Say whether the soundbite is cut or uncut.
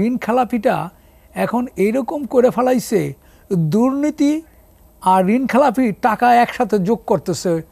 uncut